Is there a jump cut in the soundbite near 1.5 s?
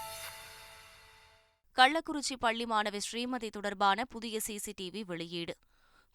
yes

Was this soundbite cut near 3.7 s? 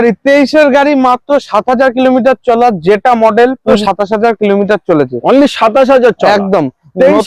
yes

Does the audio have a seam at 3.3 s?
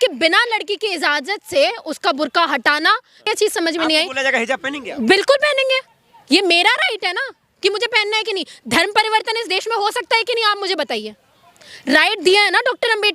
yes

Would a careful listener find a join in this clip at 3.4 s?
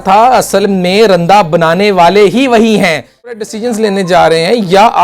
yes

